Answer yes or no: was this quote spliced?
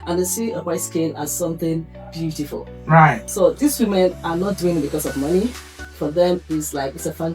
yes